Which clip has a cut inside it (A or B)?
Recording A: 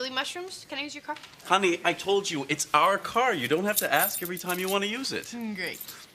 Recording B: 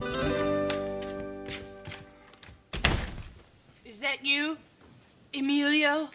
A